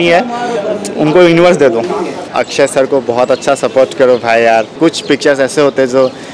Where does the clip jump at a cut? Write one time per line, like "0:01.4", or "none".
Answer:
0:02.2
0:04.7